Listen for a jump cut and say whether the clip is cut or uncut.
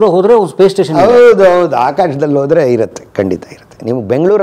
uncut